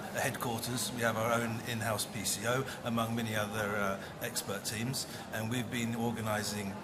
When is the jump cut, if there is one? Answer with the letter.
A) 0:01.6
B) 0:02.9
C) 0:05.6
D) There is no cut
C